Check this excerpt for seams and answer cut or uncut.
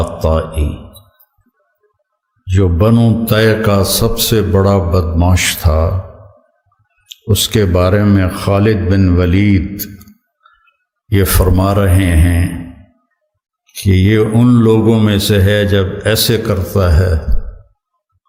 uncut